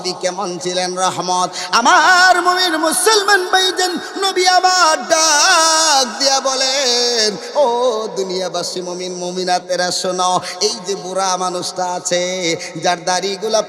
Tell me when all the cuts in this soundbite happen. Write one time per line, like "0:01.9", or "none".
none